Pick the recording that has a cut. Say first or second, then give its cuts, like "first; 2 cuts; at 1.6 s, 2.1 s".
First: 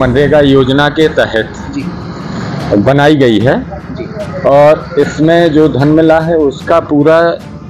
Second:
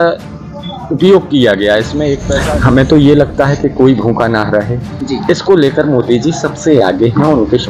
second; 1 cut; at 2.3 s